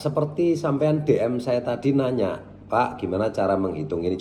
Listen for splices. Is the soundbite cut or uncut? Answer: uncut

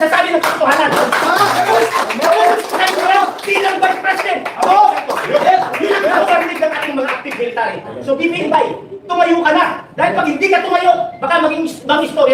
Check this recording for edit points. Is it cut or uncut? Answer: uncut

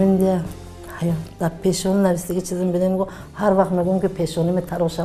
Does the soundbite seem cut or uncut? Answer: uncut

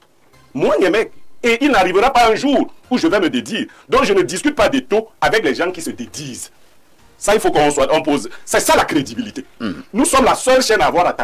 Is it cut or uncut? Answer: uncut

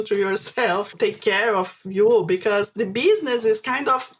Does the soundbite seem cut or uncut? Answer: cut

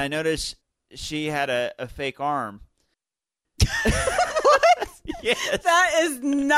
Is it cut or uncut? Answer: uncut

